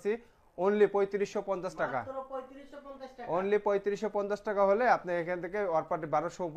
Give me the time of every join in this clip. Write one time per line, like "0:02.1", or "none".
none

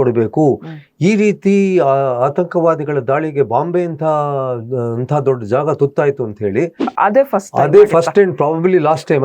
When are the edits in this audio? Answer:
0:06.8

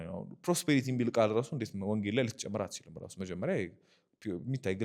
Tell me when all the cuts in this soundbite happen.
none

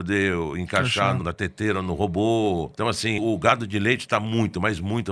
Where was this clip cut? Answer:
0:01.2
0:03.2

